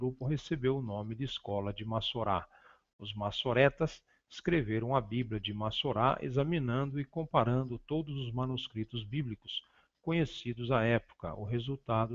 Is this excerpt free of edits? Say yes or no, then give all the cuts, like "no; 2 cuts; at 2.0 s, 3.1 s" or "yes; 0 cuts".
yes; 0 cuts